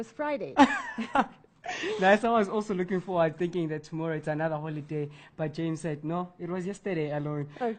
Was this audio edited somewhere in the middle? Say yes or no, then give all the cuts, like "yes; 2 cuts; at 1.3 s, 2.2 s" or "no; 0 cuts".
no; 0 cuts